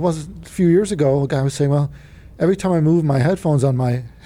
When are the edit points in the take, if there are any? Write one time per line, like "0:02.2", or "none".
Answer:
none